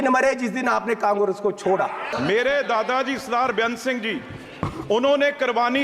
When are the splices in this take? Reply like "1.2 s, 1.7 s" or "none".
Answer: 2.1 s